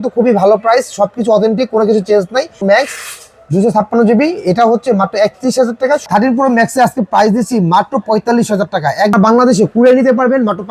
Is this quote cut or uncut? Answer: cut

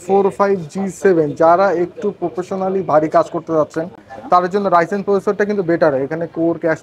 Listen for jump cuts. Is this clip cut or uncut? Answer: uncut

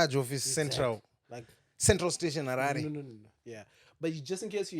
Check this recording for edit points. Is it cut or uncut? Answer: uncut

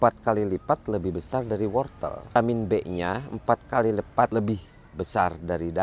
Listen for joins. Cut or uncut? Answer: cut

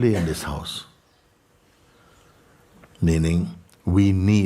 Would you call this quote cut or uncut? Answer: uncut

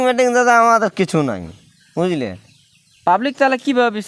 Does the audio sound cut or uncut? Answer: uncut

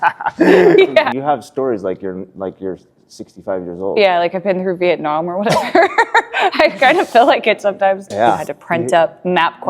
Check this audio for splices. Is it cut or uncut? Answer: cut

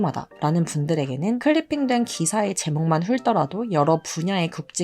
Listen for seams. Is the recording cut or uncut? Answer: cut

